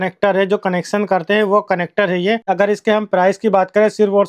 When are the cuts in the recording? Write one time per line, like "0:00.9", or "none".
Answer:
0:02.4